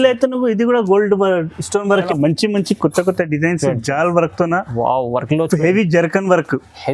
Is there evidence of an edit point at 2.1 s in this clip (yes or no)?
yes